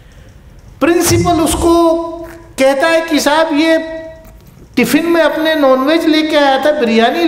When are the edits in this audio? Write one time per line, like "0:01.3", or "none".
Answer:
none